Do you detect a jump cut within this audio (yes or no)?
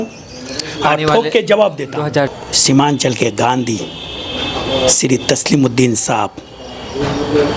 yes